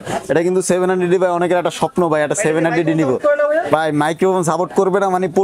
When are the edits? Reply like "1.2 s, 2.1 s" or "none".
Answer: none